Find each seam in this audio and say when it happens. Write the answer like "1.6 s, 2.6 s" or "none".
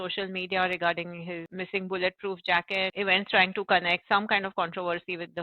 1.5 s, 2.9 s, 4.0 s